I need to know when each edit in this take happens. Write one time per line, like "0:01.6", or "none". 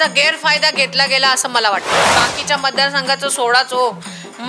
0:02.1